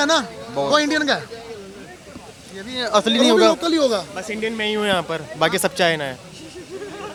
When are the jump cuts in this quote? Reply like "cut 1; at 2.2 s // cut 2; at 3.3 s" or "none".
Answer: none